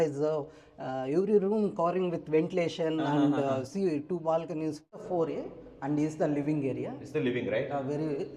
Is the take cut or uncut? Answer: cut